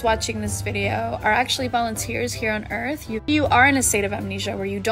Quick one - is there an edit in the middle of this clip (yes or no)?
yes